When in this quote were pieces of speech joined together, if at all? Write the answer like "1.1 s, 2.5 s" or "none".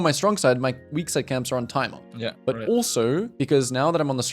2.1 s, 3.3 s